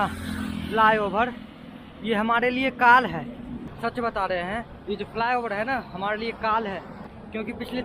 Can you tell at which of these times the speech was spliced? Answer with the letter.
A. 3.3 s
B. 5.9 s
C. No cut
C